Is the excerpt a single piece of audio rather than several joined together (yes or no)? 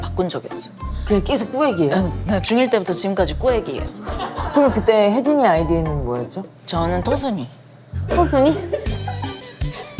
yes